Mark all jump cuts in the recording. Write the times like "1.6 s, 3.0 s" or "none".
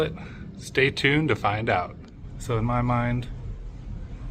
2.0 s